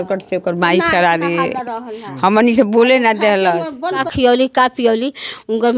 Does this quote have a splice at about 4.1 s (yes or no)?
yes